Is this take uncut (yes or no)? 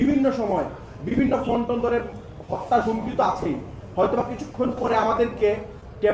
yes